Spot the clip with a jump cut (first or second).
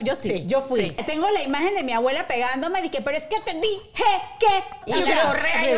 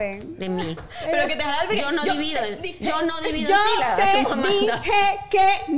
first